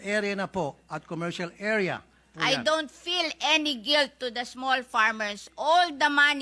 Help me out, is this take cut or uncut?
cut